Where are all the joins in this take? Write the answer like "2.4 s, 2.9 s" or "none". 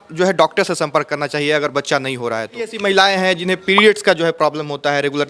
2.8 s

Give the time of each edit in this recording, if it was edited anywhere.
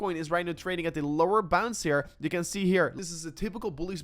2.9 s

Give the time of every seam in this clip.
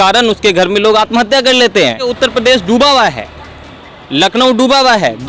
2.1 s

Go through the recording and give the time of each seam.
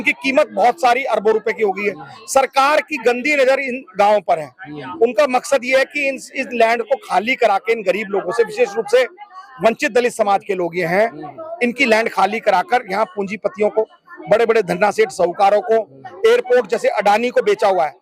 none

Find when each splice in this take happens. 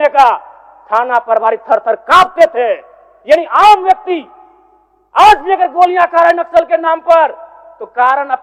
none

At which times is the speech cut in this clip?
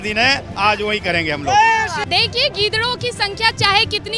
2.0 s

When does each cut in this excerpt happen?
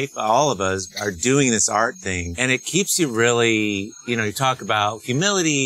none

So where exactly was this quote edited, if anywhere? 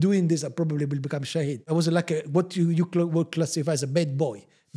1.6 s

